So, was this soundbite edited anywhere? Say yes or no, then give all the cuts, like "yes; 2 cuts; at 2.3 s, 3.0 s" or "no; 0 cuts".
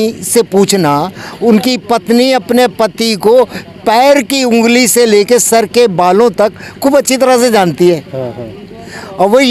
no; 0 cuts